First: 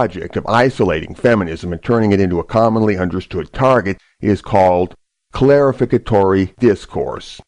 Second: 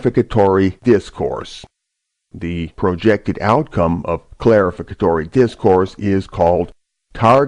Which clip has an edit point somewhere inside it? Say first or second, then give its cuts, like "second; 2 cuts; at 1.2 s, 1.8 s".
second; 1 cut; at 3.7 s